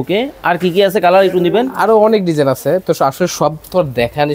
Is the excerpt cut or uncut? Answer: uncut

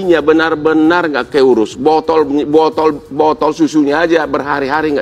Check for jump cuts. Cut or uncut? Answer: uncut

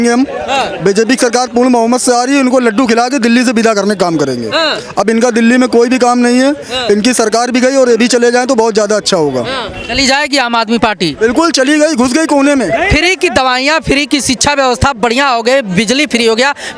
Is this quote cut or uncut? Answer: uncut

